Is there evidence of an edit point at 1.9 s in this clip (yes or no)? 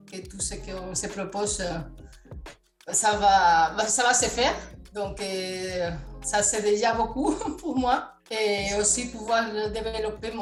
no